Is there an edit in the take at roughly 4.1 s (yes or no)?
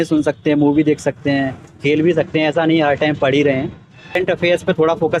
yes